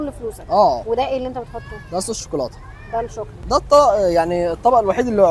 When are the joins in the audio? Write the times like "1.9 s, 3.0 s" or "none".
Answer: 0.8 s, 3.4 s